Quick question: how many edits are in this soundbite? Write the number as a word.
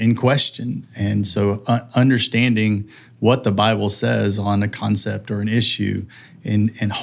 zero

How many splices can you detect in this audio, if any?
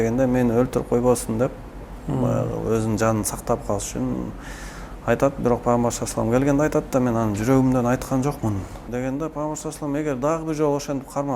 one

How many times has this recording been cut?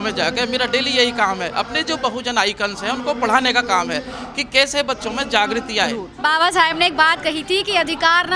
one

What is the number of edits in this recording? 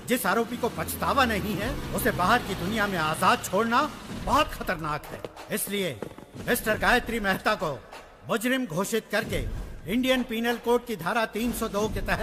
zero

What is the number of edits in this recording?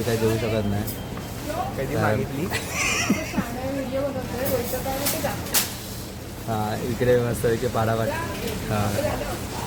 zero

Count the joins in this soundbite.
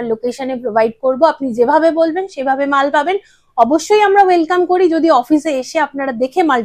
zero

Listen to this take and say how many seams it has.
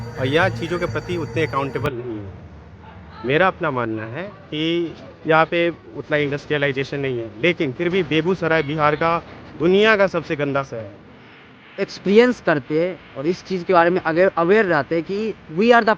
two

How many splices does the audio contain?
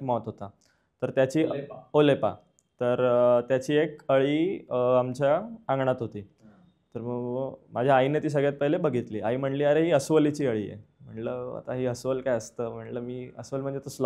zero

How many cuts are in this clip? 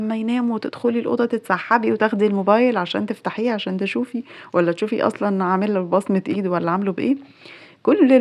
zero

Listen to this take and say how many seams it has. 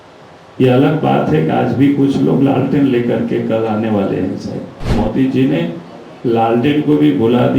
one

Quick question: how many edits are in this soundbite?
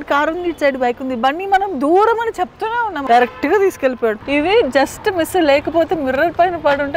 two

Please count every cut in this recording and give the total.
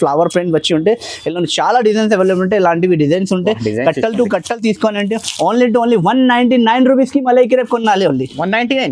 zero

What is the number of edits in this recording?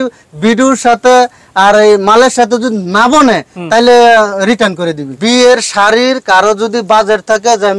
one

